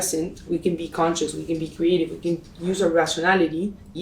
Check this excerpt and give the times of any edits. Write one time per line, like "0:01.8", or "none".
none